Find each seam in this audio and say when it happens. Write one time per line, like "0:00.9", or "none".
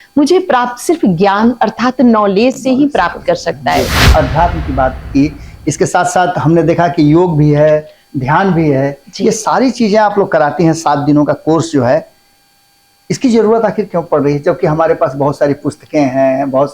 0:04.0

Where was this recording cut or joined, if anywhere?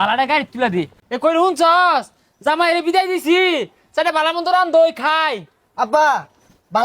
0:01.0

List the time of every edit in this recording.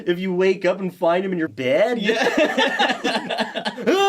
0:01.5

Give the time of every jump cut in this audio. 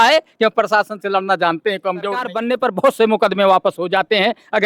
0:02.3

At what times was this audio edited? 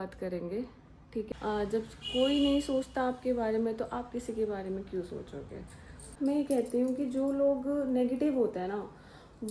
0:01.3
0:06.1

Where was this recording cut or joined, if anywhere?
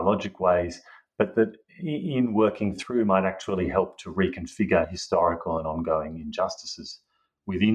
none

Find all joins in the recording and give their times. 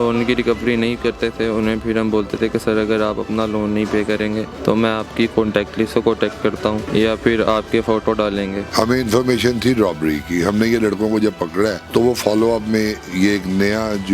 0:04.5
0:06.9
0:08.6
0:11.8

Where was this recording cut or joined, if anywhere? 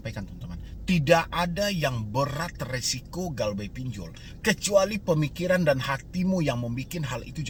none

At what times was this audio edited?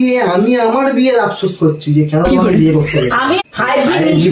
0:03.4

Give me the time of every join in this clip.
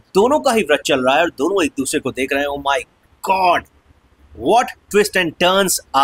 none

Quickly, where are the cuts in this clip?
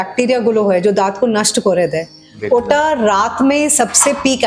none

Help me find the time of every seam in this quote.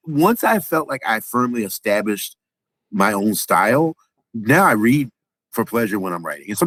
none

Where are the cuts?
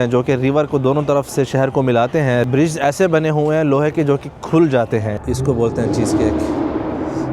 0:05.1

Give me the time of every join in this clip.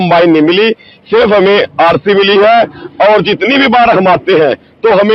none

